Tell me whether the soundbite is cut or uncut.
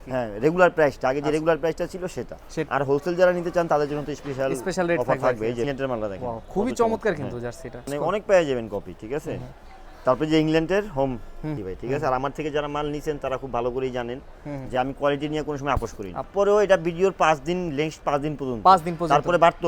cut